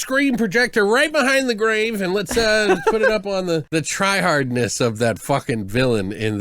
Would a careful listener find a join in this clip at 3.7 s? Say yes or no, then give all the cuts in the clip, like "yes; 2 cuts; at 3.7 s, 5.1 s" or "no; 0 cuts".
yes; 1 cut; at 3.7 s